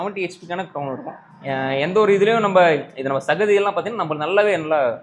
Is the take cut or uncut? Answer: uncut